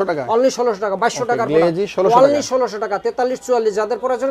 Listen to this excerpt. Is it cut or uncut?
uncut